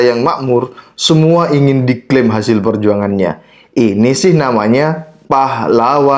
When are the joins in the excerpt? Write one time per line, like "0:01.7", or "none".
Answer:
0:05.1